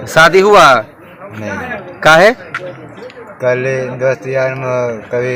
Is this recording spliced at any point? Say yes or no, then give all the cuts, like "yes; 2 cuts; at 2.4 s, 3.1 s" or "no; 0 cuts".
no; 0 cuts